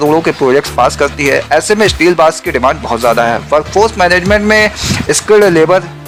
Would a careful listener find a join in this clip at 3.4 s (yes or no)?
no